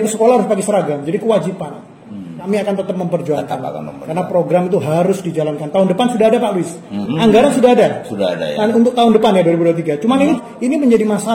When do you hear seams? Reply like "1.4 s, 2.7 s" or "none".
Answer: 2.3 s, 7.0 s, 10.4 s